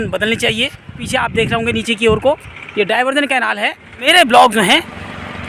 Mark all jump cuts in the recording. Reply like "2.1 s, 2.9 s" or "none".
1.1 s, 4.1 s